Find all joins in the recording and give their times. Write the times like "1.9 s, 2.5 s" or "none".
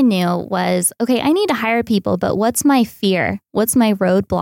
none

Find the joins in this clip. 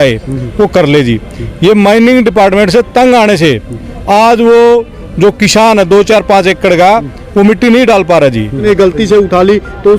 8.6 s

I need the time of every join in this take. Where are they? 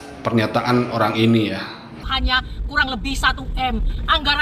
2.0 s

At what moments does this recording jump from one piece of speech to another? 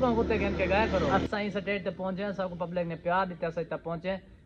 1.2 s

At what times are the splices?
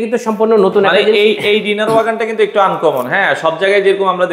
none

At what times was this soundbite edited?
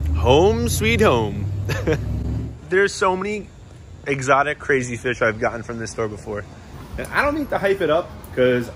none

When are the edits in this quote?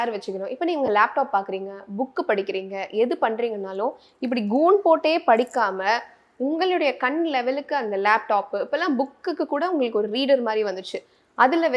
none

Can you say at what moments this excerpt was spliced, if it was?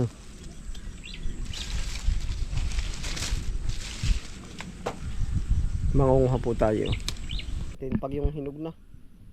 7.8 s

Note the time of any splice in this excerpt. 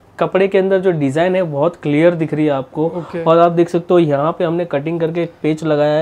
none

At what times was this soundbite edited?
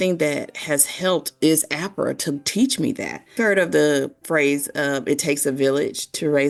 none

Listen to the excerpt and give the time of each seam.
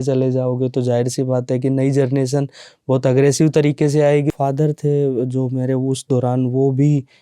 4.3 s

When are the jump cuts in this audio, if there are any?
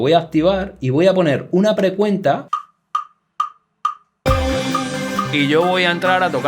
2.4 s

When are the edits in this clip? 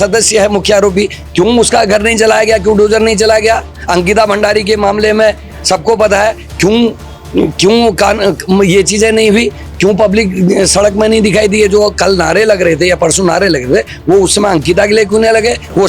none

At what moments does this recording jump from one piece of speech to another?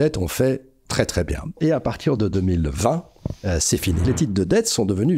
1.6 s, 4.0 s

